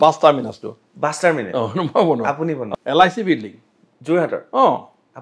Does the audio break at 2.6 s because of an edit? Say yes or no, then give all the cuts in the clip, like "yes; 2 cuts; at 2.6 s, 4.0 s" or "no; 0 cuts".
yes; 1 cut; at 2.6 s